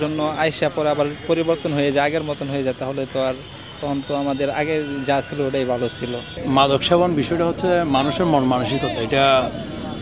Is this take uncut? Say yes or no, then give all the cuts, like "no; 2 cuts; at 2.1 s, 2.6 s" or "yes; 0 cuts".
no; 1 cut; at 6.3 s